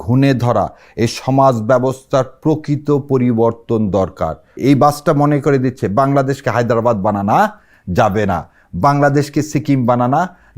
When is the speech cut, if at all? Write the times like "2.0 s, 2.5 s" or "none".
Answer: 4.4 s

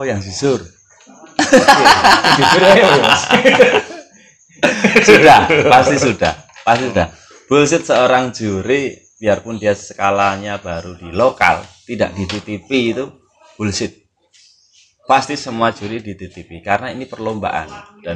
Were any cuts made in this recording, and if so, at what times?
none

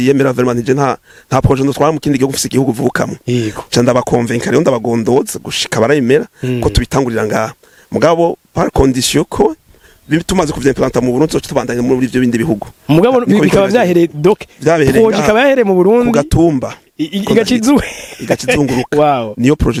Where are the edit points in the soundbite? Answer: none

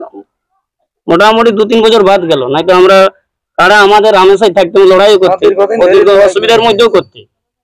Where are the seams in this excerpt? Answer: none

